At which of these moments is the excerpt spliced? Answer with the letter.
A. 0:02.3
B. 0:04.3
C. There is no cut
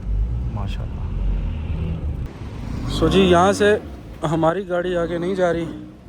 A